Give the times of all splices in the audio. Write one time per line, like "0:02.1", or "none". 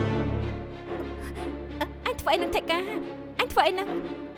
none